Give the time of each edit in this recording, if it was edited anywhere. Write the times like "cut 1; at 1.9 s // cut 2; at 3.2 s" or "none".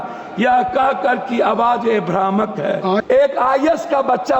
cut 1; at 3.0 s